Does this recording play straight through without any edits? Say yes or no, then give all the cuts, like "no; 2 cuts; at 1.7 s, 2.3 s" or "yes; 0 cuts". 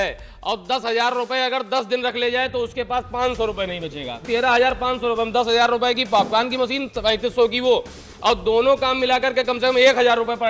no; 1 cut; at 4.2 s